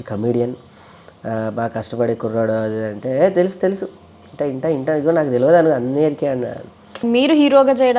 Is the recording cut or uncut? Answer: cut